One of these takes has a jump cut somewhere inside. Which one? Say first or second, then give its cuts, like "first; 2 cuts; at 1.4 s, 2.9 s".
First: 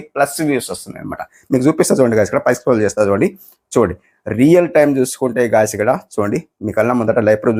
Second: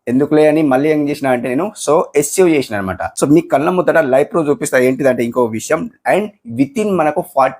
second; 1 cut; at 3.0 s